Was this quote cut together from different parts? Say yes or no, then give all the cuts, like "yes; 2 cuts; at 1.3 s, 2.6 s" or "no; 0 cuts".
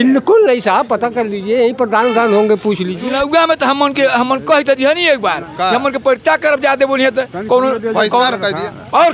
yes; 1 cut; at 3.0 s